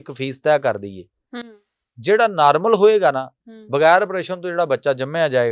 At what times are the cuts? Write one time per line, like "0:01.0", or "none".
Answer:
none

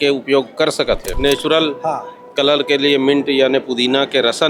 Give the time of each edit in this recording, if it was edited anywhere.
0:01.1

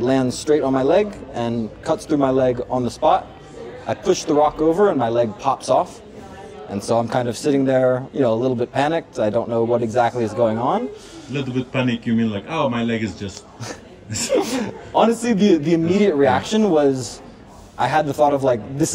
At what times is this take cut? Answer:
none

